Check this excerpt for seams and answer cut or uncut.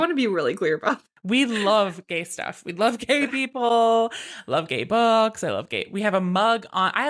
cut